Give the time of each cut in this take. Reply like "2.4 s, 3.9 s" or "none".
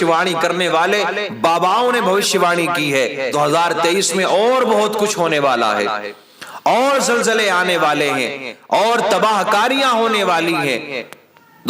3.3 s